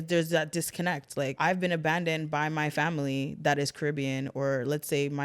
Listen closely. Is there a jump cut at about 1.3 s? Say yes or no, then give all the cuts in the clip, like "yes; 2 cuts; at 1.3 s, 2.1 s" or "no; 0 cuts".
yes; 1 cut; at 1.3 s